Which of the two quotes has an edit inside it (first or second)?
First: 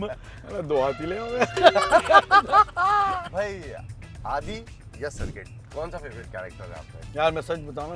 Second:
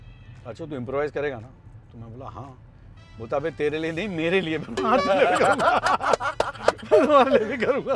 first